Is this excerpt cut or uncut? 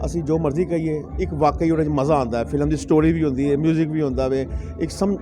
uncut